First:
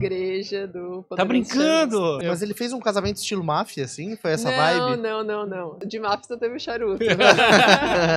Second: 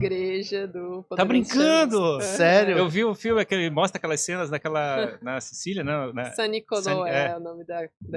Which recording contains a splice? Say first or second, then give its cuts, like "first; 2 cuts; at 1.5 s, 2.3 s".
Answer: first; 2 cuts; at 2.2 s, 5.8 s